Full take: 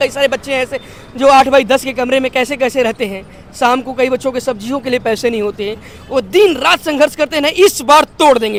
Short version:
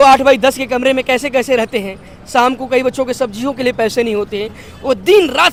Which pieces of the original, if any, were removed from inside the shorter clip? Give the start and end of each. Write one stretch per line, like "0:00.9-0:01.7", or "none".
none